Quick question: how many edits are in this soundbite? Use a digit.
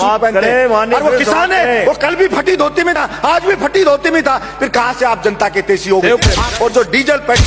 1